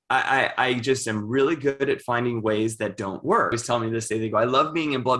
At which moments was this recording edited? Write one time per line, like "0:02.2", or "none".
0:03.6